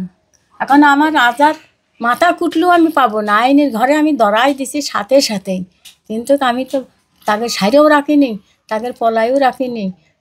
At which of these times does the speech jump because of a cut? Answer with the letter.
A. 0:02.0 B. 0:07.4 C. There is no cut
C